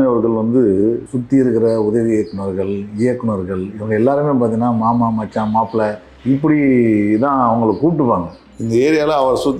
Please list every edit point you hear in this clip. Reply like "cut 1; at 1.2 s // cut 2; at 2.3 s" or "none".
cut 1; at 1.1 s // cut 2; at 6.1 s // cut 3; at 8.4 s